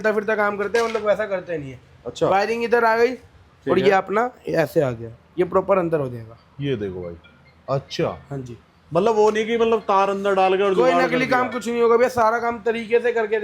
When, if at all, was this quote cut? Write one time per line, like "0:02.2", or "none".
none